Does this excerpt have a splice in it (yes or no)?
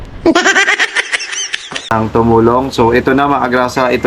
yes